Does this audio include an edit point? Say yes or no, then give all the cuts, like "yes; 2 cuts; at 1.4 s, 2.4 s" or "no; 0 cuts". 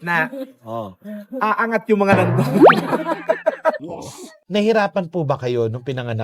yes; 1 cut; at 3.9 s